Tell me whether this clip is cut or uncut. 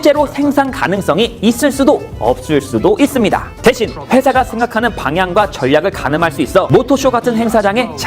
cut